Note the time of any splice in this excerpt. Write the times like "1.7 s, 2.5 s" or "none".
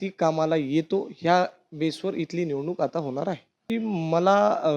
3.5 s